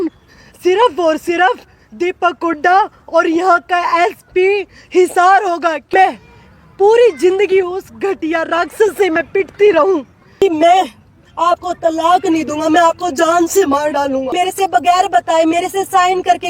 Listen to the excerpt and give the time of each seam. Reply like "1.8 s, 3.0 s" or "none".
5.9 s, 10.4 s, 14.3 s